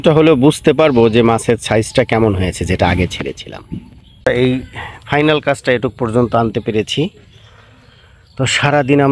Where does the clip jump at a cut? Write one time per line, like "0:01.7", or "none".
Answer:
0:04.2